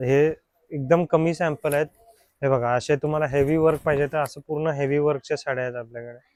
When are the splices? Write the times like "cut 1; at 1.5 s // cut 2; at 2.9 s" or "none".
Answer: none